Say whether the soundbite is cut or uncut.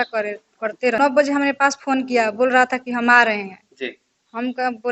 cut